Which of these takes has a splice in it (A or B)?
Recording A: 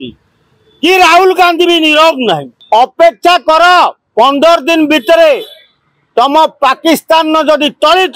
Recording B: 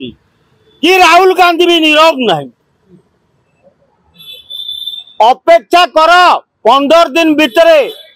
A